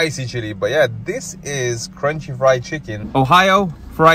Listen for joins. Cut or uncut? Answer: cut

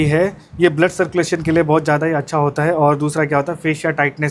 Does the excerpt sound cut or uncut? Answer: uncut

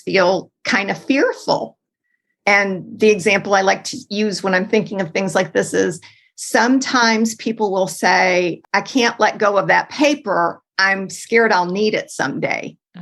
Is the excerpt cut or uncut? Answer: cut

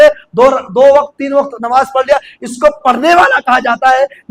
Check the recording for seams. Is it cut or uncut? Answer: uncut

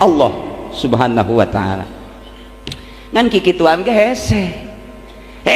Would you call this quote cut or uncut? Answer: uncut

